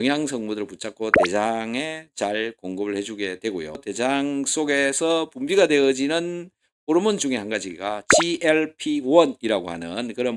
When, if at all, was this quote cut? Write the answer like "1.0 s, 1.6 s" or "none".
3.8 s